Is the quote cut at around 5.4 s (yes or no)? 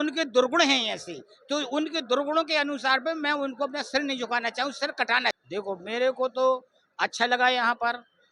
yes